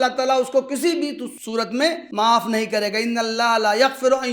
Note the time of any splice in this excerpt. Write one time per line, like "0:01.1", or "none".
0:01.8

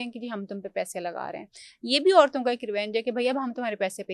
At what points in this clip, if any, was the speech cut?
none

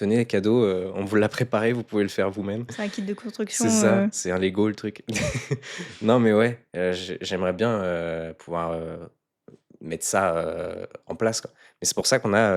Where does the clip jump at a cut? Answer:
none

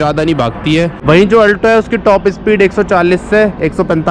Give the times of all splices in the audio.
0:01.0

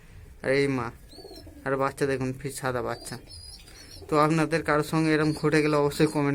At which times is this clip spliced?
none

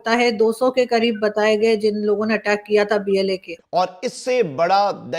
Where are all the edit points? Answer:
0:03.5

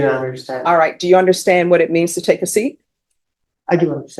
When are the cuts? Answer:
none

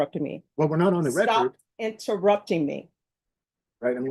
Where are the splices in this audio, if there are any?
none

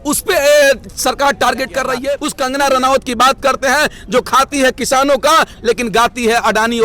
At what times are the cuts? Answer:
0:02.3

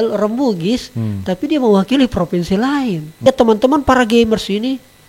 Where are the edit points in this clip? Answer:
0:03.2

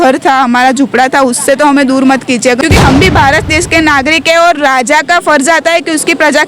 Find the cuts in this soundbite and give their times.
0:02.6

